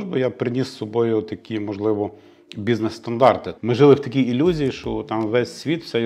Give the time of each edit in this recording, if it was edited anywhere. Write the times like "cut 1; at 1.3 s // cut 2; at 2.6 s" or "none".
cut 1; at 3.5 s